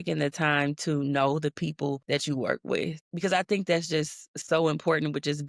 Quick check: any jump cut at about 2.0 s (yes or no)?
yes